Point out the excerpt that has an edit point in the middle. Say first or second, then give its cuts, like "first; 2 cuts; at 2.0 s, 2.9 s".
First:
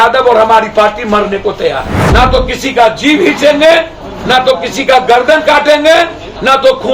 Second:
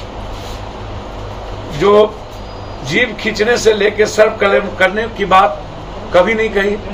first; 1 cut; at 2.0 s